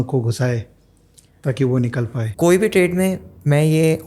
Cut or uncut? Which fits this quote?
cut